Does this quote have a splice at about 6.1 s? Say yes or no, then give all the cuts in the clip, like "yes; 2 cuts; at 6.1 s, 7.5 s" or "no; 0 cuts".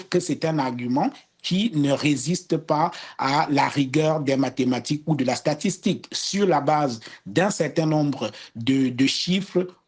no; 0 cuts